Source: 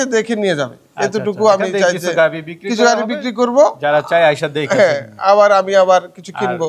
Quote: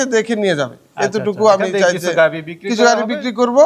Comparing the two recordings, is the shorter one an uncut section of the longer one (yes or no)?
yes